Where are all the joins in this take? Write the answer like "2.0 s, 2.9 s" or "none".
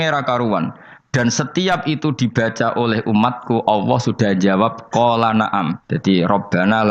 5.8 s